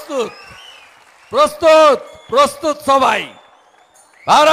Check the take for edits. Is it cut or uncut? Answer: uncut